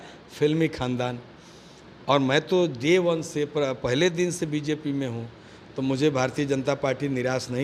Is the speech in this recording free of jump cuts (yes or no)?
yes